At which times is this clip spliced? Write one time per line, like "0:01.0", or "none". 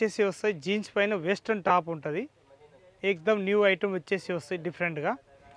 none